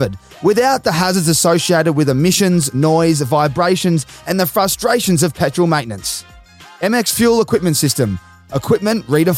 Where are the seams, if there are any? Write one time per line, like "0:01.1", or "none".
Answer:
none